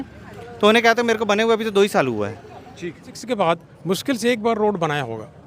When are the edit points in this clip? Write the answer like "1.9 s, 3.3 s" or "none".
3.2 s